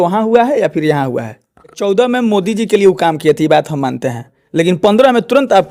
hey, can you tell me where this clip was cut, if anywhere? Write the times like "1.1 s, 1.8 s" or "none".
1.8 s